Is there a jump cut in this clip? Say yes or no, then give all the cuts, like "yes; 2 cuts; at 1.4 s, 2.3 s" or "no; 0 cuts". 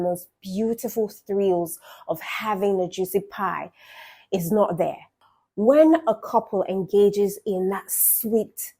yes; 1 cut; at 5.1 s